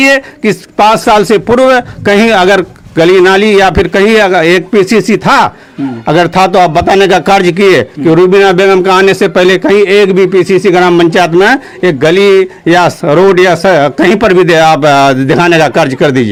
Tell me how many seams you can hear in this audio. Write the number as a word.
zero